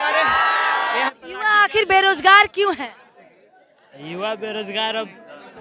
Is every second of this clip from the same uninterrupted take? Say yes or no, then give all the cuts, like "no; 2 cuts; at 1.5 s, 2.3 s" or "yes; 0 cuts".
no; 1 cut; at 1.1 s